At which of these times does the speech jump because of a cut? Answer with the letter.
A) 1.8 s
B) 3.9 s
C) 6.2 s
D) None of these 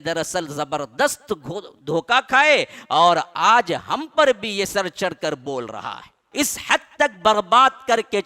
C